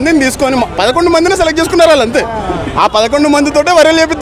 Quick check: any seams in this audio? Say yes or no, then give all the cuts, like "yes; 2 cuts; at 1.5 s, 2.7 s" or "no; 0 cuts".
no; 0 cuts